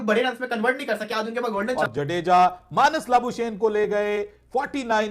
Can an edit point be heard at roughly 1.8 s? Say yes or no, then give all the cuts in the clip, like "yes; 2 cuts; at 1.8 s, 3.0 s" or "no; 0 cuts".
yes; 1 cut; at 1.8 s